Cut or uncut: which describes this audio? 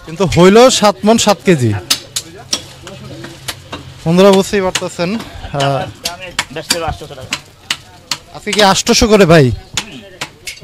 uncut